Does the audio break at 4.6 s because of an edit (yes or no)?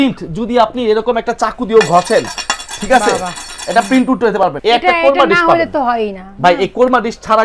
yes